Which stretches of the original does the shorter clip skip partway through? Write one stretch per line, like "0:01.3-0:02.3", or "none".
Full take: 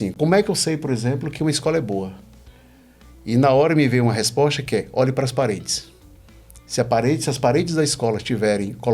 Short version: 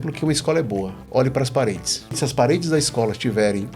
0:02.2-0:04.9
0:06.0-0:07.2